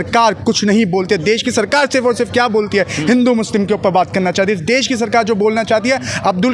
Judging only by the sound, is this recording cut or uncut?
uncut